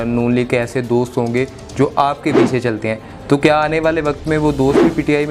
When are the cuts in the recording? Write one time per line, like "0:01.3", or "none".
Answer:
none